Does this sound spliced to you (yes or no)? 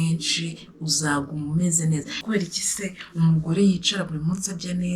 yes